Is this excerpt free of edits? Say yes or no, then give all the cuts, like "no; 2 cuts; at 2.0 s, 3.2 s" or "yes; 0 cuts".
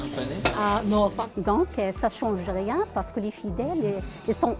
no; 1 cut; at 1.2 s